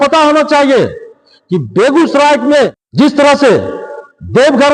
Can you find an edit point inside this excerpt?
yes; 1 cut; at 2.8 s

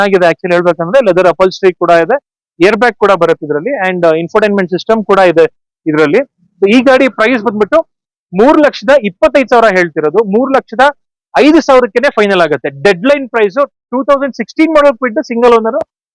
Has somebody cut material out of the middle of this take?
no; 0 cuts

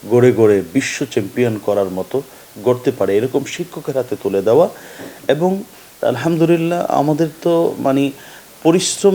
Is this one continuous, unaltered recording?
no; 1 cut; at 5.7 s

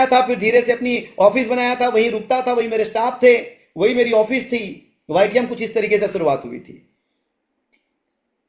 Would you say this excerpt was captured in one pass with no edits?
yes; 0 cuts

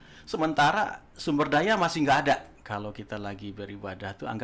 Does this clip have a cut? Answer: yes; 1 cut; at 2.6 s

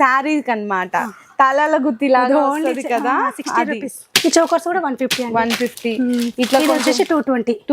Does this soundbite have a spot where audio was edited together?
yes; 1 cut; at 4.0 s

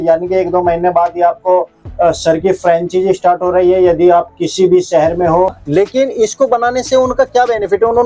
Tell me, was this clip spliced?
yes; 1 cut; at 5.6 s

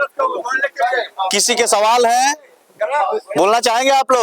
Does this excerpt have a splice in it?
no; 0 cuts

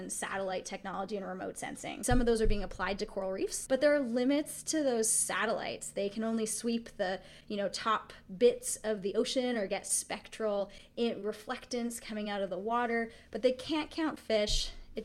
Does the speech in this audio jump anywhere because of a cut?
yes; 2 cuts; at 2.0 s, 3.6 s

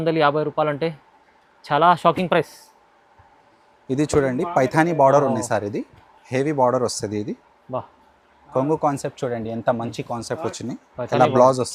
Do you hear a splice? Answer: no; 0 cuts

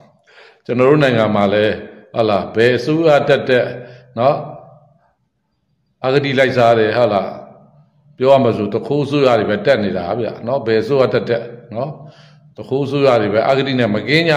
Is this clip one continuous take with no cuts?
yes; 0 cuts

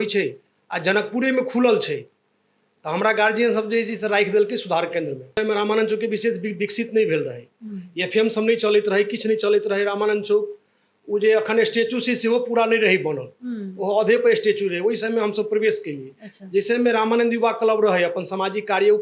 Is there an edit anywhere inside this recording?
yes; 1 cut; at 5.4 s

